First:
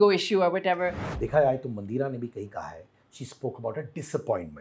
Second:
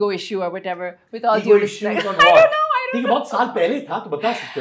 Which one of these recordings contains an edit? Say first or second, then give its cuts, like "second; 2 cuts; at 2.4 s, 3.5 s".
first; 1 cut; at 1.0 s